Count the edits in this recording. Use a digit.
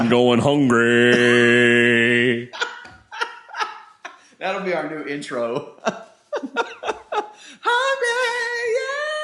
0